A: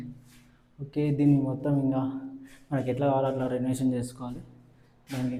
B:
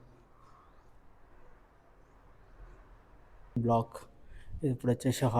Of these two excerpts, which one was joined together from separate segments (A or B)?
B